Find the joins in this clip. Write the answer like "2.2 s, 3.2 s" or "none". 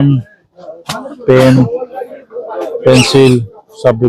none